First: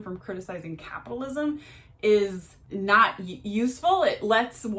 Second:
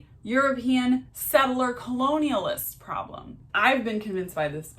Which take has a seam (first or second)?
second